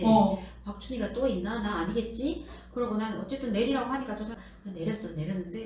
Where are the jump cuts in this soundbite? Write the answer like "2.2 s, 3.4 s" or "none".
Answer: 4.3 s